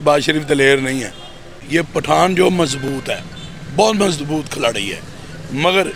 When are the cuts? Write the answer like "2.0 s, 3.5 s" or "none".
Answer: 1.6 s